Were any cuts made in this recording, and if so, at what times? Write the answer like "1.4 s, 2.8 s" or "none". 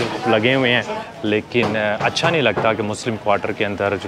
1.0 s